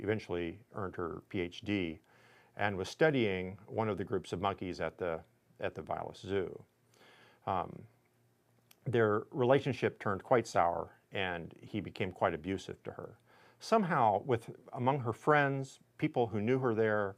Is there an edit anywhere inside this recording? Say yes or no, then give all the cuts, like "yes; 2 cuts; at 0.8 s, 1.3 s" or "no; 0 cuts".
no; 0 cuts